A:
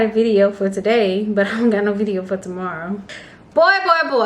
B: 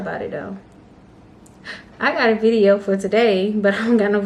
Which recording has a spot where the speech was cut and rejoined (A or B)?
A